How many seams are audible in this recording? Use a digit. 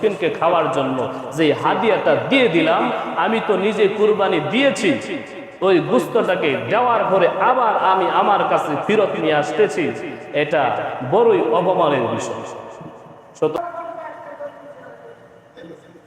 1